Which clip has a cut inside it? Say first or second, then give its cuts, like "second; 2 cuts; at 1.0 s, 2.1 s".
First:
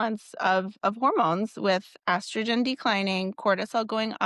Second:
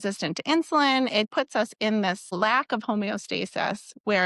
second; 1 cut; at 1.3 s